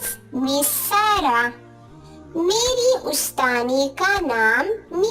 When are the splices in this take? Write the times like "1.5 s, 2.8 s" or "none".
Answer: none